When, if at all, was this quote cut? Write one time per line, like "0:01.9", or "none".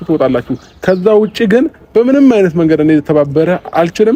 none